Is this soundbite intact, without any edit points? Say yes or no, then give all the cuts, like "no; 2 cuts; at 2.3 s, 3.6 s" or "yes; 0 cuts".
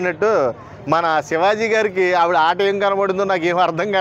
yes; 0 cuts